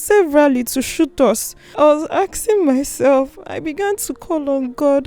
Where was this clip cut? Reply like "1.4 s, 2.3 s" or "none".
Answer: 1.7 s

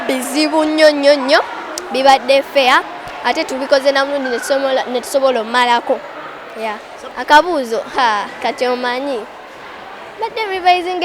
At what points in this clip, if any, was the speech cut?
7.1 s

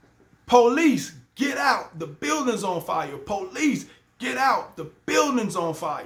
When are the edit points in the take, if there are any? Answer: none

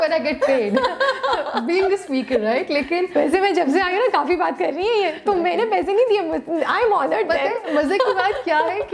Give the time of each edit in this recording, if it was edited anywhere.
none

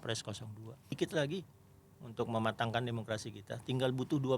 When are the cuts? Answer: 1.0 s

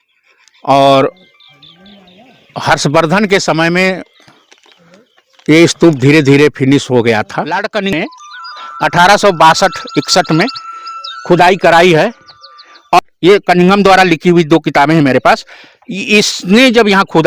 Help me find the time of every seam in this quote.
7.5 s, 13.0 s

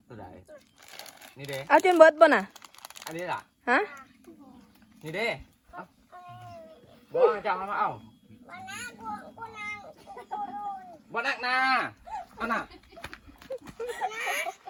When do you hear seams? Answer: none

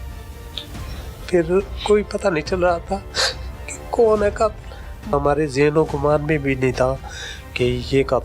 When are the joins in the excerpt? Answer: 1.0 s, 5.1 s

